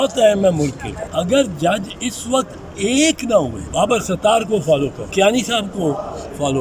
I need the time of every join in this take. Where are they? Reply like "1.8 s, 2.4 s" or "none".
0.9 s, 3.6 s, 5.0 s